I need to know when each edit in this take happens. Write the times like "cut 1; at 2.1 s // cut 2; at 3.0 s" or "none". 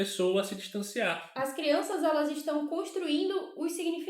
cut 1; at 1.2 s